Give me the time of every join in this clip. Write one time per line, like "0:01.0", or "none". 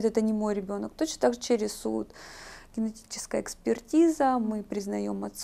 none